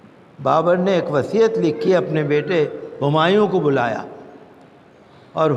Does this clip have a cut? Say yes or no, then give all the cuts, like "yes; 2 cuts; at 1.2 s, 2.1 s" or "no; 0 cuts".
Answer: no; 0 cuts